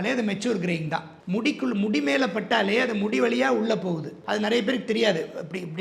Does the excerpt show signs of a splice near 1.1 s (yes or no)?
yes